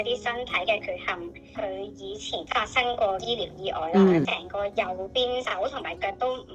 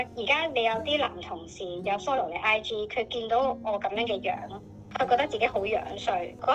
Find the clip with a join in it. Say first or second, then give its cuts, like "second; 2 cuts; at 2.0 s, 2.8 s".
first; 2 cuts; at 1.4 s, 4.2 s